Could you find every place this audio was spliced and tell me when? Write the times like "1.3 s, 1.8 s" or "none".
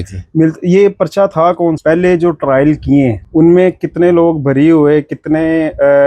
1.8 s, 3.2 s